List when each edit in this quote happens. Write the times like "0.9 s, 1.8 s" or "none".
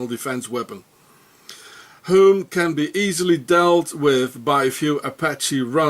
4.6 s